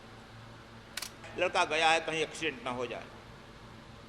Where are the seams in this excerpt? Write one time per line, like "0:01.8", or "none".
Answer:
0:01.2